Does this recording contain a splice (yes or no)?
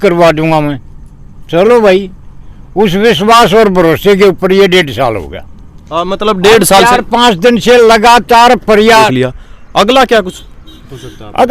yes